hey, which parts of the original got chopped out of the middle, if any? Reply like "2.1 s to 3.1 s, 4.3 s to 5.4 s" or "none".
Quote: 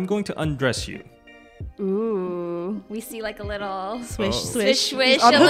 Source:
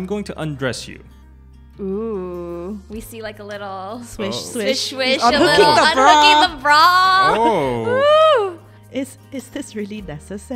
none